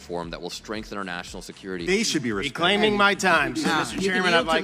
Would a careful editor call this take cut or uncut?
uncut